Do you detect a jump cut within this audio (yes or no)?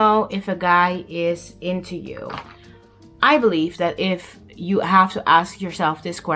no